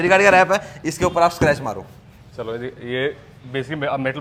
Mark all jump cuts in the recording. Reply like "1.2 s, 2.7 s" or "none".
none